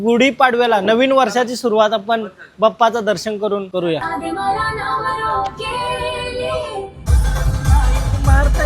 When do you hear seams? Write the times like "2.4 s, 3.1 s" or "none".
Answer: 4.0 s